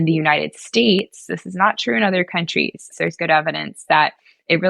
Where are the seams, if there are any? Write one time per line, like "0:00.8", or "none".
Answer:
0:02.9